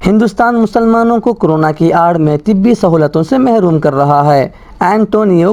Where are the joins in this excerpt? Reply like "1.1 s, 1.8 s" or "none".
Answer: none